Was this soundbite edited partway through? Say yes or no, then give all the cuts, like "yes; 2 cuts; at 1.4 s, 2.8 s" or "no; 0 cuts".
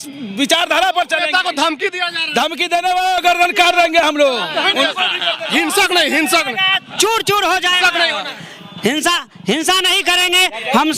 no; 0 cuts